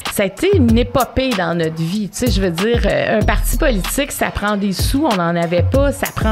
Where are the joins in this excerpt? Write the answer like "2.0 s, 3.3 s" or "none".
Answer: 2.9 s